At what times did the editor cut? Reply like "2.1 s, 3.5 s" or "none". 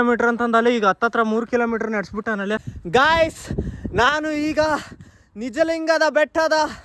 2.7 s